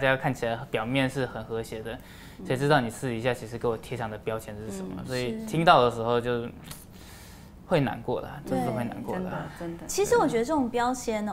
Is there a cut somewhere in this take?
no; 0 cuts

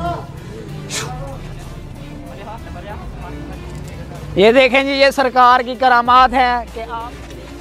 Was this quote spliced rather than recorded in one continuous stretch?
no; 0 cuts

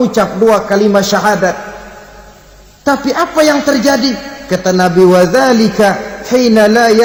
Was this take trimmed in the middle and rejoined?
no; 0 cuts

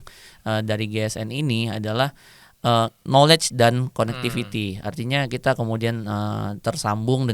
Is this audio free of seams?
yes; 0 cuts

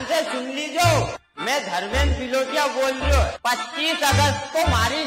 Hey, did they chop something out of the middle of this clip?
no; 0 cuts

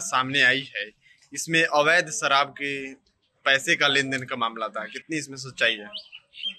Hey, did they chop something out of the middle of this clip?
no; 0 cuts

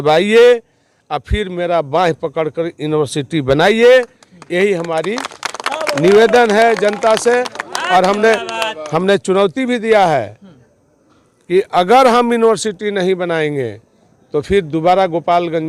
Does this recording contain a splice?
no; 0 cuts

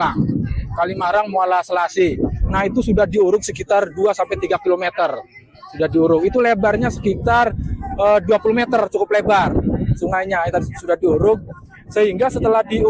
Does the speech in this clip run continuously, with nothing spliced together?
yes; 0 cuts

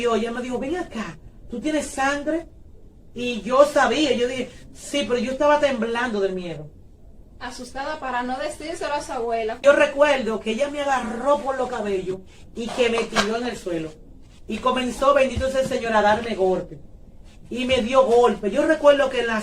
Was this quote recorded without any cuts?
no; 1 cut; at 9.6 s

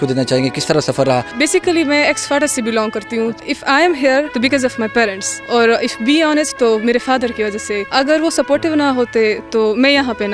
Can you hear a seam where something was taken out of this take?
yes; 5 cuts; at 1.3 s, 3.4 s, 4.3 s, 5.3 s, 7.8 s

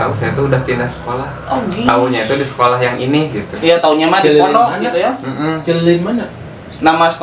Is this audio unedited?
yes; 0 cuts

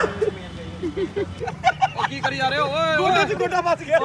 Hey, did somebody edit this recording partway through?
no; 0 cuts

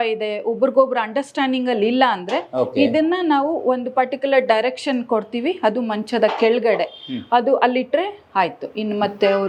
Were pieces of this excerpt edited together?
no; 0 cuts

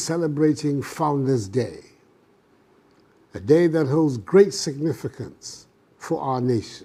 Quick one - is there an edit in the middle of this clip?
no; 0 cuts

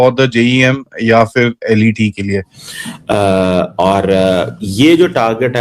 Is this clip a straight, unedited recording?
no; 1 cut; at 2.6 s

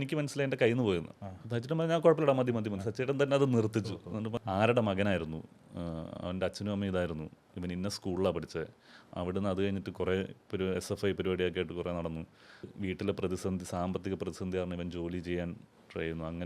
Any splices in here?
yes; 2 cuts; at 4.4 s, 12.7 s

